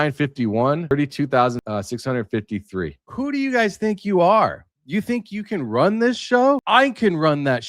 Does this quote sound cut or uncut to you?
cut